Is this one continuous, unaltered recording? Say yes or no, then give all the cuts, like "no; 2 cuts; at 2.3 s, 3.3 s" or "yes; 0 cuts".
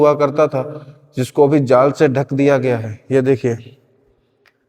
yes; 0 cuts